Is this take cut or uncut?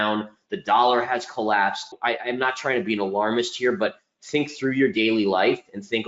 cut